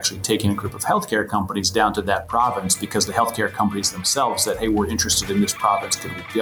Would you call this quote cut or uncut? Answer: uncut